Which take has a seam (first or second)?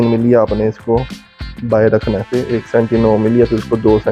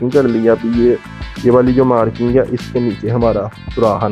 first